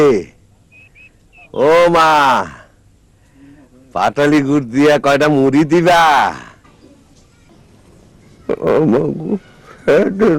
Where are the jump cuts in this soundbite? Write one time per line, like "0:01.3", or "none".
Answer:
0:07.5